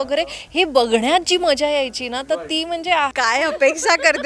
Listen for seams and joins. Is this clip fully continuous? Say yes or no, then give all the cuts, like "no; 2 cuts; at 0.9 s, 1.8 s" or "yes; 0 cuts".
no; 1 cut; at 3.1 s